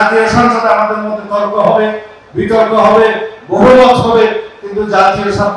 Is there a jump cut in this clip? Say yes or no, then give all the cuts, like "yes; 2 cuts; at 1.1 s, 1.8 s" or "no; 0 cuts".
no; 0 cuts